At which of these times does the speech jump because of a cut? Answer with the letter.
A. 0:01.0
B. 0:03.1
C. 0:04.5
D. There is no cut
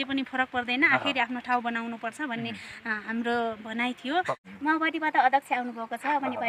C